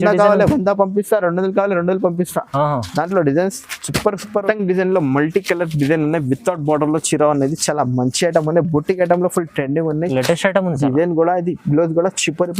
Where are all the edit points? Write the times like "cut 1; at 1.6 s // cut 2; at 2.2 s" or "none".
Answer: cut 1; at 4.4 s

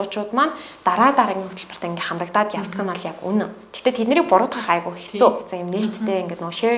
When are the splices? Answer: cut 1; at 5.5 s

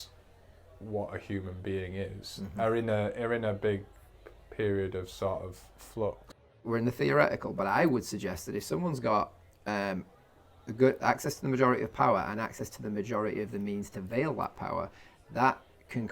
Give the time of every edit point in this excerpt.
cut 1; at 6.6 s

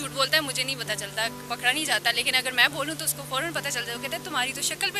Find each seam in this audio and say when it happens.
none

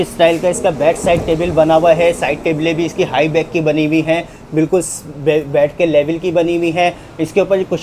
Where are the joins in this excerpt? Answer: none

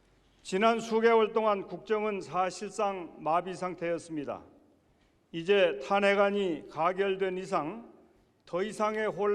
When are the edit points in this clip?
cut 1; at 3.8 s

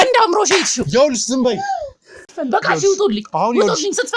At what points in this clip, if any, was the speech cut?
cut 1; at 2.3 s

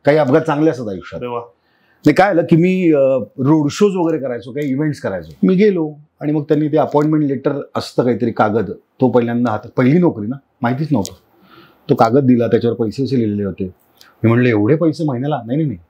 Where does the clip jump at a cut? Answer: cut 1; at 5.2 s

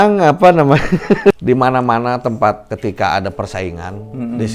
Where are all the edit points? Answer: cut 1; at 1.4 s // cut 2; at 2.7 s

